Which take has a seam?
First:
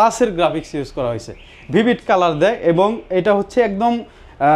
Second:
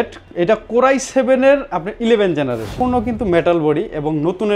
second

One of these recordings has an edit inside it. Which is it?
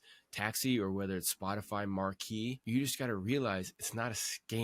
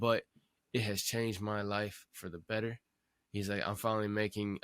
first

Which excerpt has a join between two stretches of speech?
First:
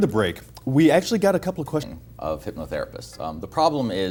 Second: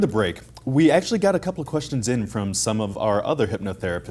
second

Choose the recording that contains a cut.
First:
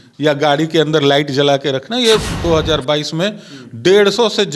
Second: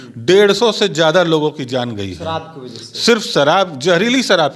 first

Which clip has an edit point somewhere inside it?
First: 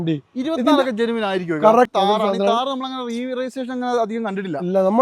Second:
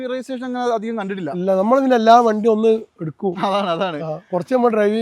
first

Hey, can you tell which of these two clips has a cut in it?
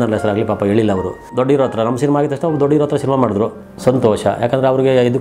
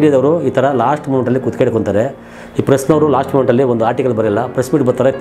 first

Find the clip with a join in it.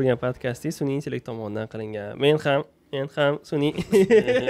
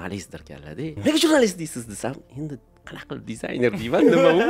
second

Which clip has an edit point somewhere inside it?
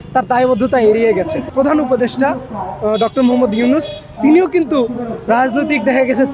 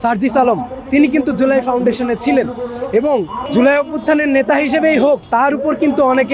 first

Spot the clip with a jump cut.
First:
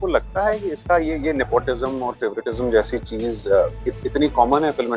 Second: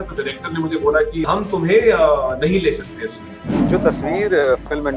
second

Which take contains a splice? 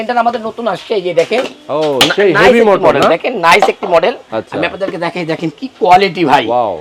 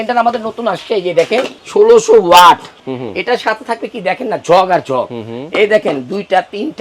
second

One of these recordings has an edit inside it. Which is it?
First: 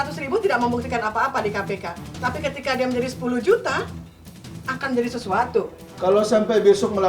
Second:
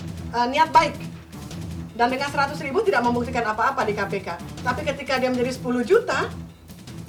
first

